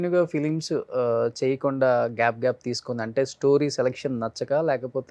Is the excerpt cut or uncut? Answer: uncut